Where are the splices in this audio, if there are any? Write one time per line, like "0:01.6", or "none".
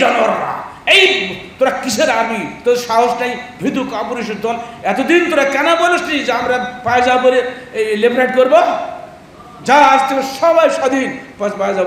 none